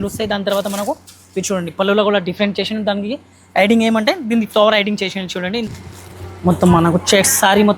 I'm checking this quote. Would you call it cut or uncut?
cut